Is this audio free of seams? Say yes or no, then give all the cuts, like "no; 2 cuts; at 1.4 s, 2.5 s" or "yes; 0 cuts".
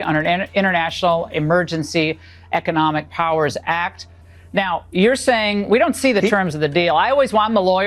no; 1 cut; at 4.1 s